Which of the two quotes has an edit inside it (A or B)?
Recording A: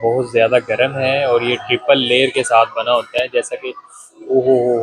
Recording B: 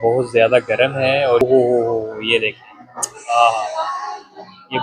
B